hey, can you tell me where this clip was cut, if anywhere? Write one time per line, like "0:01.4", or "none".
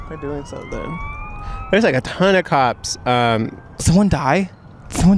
0:03.8